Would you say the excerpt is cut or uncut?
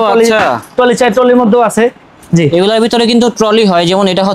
uncut